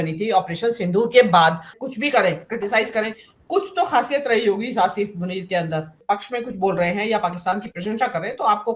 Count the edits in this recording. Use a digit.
2